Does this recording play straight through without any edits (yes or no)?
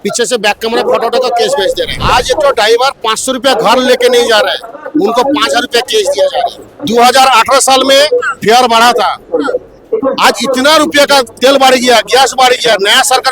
no